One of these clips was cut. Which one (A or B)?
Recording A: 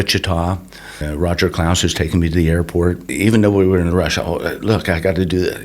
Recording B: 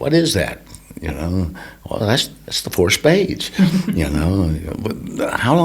A